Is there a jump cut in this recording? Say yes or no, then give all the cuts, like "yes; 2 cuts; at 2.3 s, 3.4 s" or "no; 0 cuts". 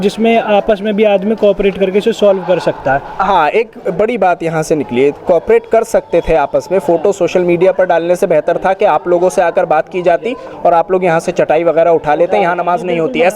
no; 0 cuts